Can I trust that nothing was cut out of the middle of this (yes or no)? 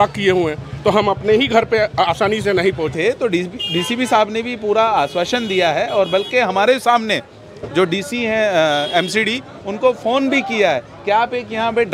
no